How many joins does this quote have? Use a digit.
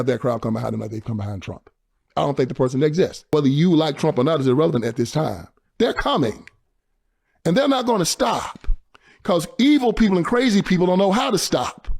1